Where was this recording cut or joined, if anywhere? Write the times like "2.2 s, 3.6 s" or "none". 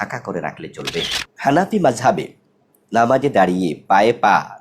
1.2 s